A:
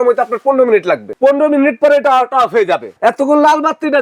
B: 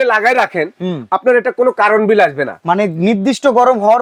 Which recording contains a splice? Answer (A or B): A